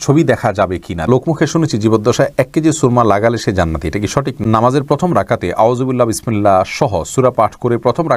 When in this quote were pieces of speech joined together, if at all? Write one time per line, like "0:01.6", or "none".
0:01.1
0:04.4